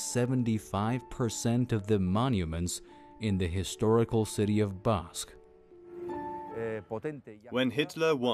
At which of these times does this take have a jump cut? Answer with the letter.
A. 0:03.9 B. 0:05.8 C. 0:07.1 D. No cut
A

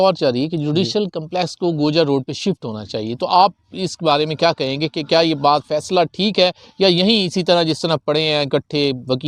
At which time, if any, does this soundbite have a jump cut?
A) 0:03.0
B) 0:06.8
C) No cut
C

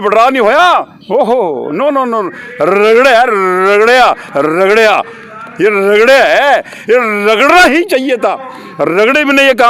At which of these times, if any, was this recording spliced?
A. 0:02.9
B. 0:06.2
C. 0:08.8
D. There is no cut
D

